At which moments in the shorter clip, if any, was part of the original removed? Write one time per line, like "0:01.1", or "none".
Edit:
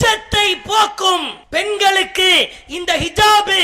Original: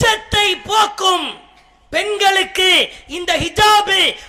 0:01.4